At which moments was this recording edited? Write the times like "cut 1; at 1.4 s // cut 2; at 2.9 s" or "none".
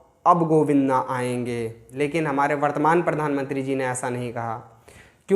cut 1; at 1.8 s